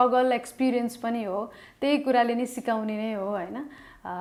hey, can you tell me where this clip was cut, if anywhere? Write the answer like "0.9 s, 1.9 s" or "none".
none